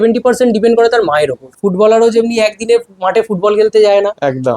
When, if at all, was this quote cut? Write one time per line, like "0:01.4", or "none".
0:01.4